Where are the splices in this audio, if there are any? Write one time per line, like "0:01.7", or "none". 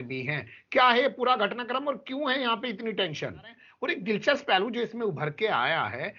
0:03.7